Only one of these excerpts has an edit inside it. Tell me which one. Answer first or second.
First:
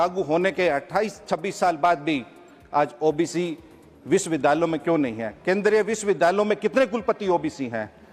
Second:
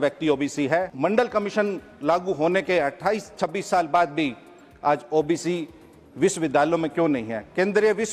second